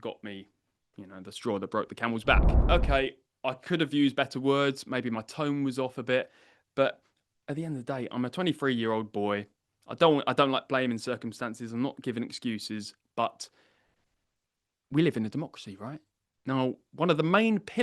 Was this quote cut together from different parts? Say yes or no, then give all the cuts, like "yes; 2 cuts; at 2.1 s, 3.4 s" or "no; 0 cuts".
yes; 1 cut; at 2.6 s